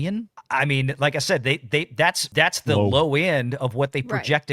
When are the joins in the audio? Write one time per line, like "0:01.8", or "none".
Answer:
0:02.2